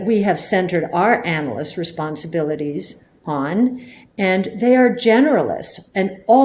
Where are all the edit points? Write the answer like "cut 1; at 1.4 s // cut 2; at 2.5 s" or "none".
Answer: none